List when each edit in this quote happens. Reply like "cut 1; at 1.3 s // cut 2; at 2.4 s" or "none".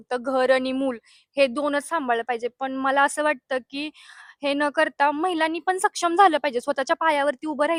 none